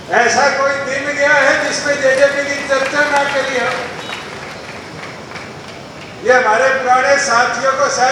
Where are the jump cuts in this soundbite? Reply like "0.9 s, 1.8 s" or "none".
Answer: none